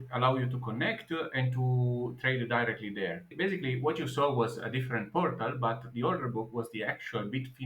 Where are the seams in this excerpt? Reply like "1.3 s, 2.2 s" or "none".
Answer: 3.3 s